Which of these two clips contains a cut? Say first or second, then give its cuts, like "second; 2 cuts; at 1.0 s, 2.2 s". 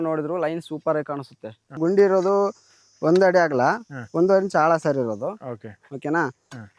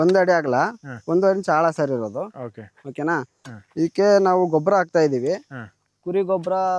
first; 1 cut; at 1.8 s